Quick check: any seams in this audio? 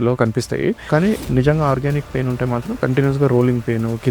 yes; 2 cuts; at 0.8 s, 2.8 s

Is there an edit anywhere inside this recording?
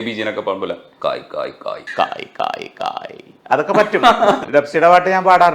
yes; 2 cuts; at 1.8 s, 4.4 s

